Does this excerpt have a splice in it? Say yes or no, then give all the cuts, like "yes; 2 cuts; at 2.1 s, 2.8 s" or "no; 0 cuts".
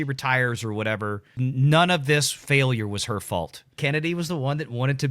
yes; 2 cuts; at 1.3 s, 3.7 s